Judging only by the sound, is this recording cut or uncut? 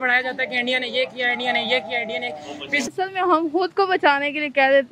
cut